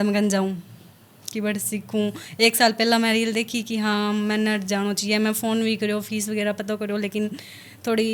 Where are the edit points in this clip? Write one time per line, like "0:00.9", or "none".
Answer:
none